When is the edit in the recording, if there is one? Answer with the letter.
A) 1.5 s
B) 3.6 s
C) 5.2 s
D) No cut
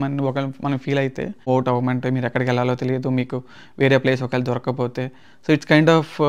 A